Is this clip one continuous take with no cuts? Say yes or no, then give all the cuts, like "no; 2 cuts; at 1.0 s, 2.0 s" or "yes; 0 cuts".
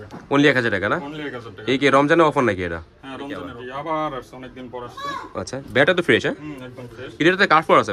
no; 1 cut; at 3.6 s